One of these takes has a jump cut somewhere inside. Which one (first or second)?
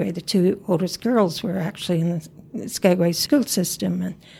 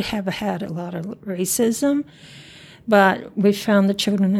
first